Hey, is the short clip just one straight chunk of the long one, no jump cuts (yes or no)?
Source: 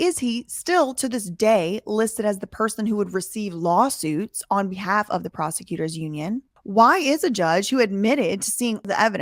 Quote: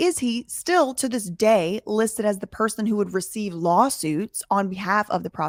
yes